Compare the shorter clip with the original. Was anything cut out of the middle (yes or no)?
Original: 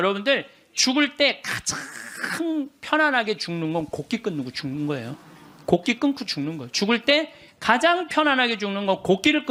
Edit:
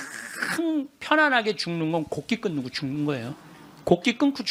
no